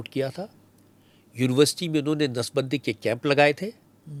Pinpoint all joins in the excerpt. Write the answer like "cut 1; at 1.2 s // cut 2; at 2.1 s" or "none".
none